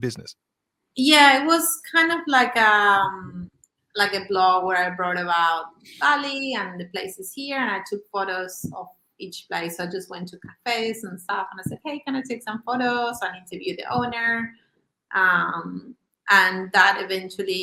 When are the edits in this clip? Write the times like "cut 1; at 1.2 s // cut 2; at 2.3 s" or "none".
none